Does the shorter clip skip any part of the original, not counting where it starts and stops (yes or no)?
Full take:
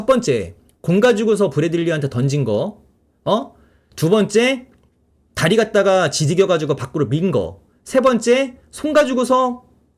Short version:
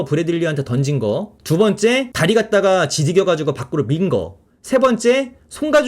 yes